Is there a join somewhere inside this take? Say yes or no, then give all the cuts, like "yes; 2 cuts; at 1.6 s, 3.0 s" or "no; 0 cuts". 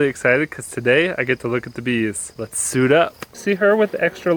yes; 2 cuts; at 2.3 s, 3.4 s